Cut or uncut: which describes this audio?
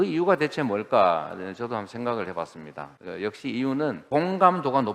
uncut